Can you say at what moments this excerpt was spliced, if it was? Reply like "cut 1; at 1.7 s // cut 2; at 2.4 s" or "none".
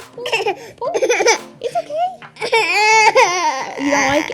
none